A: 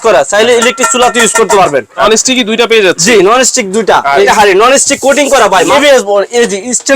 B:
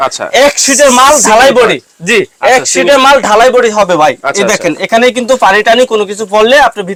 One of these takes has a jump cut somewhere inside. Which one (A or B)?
A